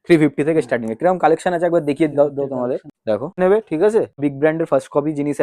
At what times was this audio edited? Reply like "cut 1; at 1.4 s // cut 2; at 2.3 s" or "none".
cut 1; at 3.4 s // cut 2; at 4.2 s